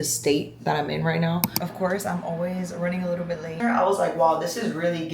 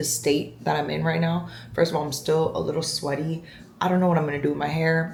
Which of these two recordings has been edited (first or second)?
first